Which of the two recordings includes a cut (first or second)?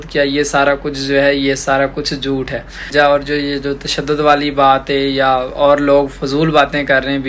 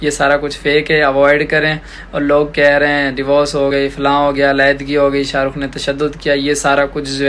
first